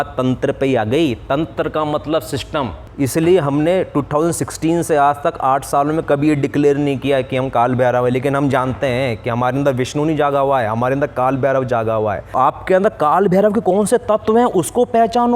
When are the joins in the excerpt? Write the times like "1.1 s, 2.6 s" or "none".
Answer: 2.8 s, 12.3 s